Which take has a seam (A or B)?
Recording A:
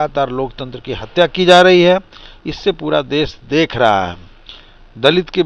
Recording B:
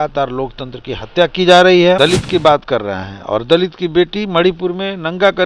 B